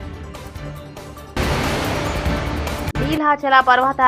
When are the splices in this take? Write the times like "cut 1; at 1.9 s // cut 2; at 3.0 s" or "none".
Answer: cut 1; at 1.3 s // cut 2; at 2.9 s